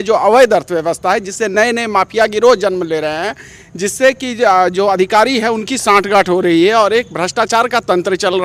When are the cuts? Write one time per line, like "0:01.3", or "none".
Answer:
none